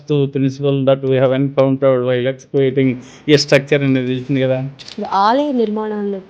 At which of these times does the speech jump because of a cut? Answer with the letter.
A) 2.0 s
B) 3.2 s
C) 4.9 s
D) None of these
C